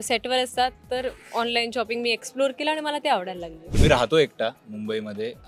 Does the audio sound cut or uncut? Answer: cut